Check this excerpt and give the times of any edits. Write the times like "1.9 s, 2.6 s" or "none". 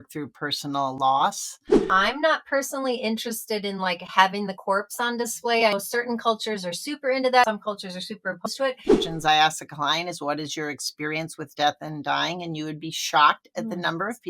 1.9 s, 7.5 s, 9.1 s